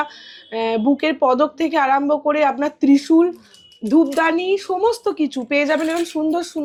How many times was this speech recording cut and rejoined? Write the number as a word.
zero